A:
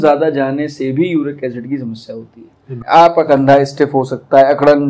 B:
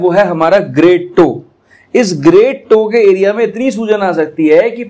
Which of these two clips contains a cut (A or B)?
A